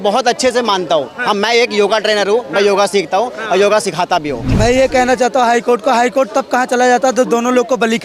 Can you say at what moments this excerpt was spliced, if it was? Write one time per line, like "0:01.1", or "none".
0:04.4